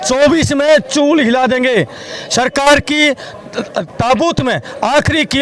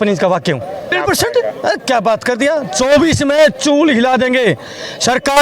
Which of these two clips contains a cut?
second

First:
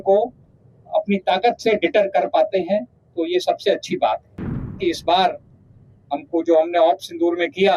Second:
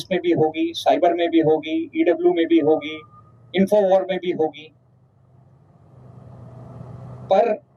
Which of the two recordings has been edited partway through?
first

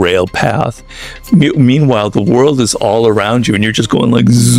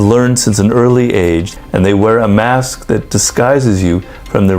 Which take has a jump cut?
second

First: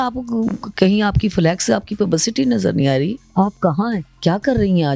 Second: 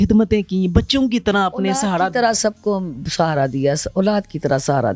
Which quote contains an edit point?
first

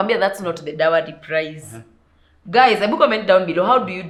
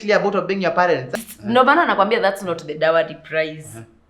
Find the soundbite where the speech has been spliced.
second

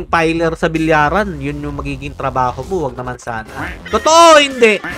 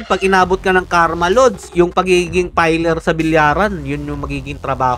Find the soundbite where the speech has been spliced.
first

